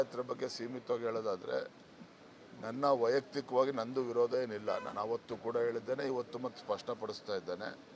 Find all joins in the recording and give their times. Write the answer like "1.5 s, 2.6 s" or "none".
none

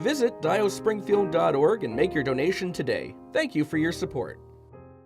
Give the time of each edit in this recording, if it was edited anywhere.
3.1 s, 4.3 s

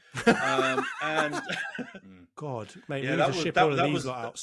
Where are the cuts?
2.0 s

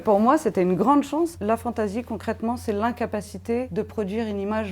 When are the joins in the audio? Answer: 1.4 s, 3.7 s

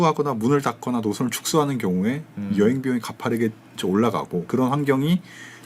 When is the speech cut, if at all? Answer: 4.5 s

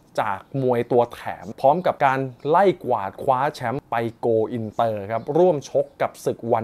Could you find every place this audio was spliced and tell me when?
1.5 s, 3.8 s

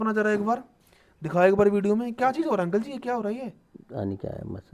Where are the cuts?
none

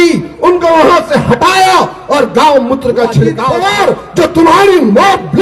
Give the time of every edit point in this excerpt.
3.4 s

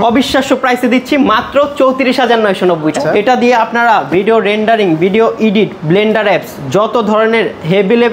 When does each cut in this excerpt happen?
3.0 s

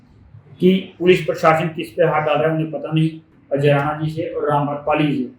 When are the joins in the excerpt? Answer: 3.3 s

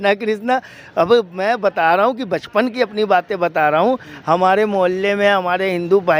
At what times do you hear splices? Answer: none

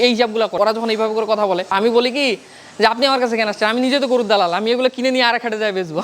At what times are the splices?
1.7 s

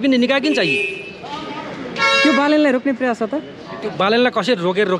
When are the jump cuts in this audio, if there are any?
none

